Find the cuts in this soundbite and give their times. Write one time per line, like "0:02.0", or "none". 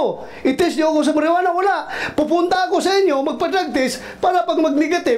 none